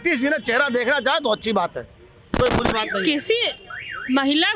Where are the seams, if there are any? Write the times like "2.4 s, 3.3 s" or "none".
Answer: none